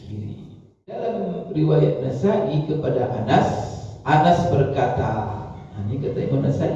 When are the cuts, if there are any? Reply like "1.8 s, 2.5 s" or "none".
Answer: 1.0 s